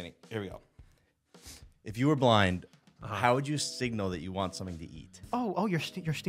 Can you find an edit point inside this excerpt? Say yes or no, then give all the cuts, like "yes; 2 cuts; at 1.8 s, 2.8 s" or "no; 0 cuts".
yes; 1 cut; at 5.2 s